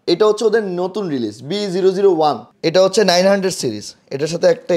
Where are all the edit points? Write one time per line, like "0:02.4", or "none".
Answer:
0:02.5

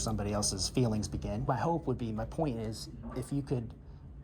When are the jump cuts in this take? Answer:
0:01.5

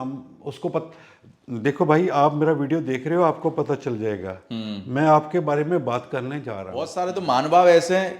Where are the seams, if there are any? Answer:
0:06.9

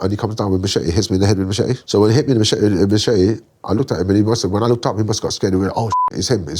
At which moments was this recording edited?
0:01.8

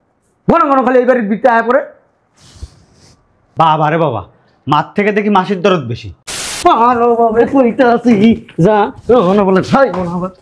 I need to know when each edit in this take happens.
0:06.4

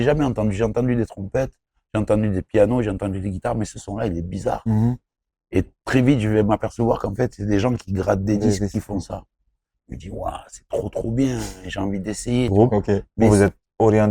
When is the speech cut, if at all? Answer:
0:13.1

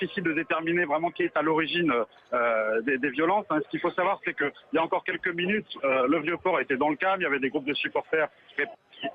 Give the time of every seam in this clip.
0:04.2

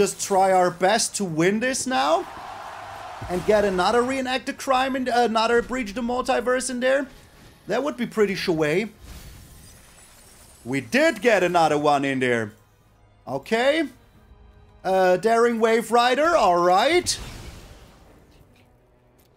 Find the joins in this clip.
none

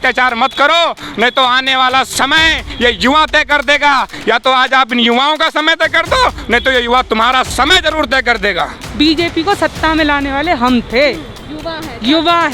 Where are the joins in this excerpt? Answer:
0:08.8

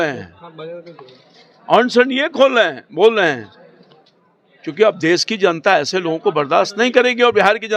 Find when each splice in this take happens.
none

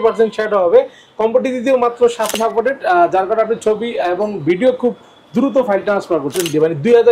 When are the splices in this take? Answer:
0:02.3
0:06.4

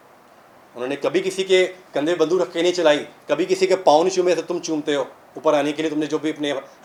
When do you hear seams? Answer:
none

